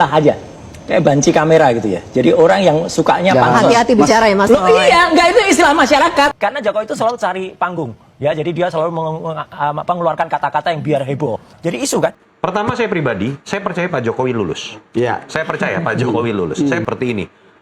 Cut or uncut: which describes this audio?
cut